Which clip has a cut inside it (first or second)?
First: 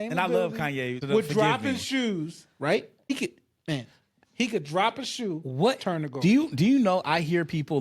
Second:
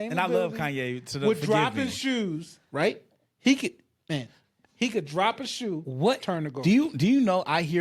first